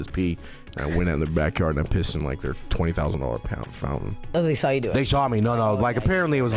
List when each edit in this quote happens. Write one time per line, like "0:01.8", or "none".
0:04.3